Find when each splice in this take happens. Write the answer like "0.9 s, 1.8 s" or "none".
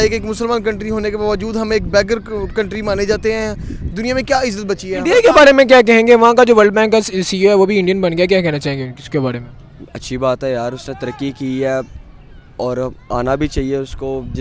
5.0 s